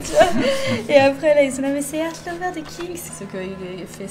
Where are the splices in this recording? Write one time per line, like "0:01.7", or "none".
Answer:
0:03.1